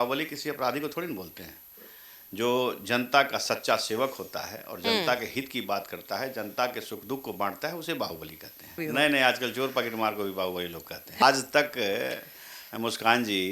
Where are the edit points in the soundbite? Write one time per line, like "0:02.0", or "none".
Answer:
0:08.8
0:11.2